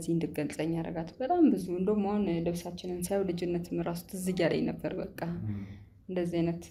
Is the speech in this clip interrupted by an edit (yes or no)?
no